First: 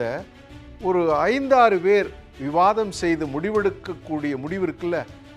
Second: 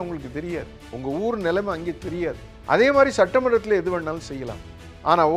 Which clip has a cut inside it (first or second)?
second